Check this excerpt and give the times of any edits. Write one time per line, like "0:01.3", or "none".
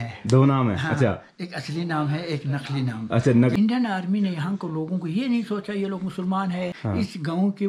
0:03.6
0:06.8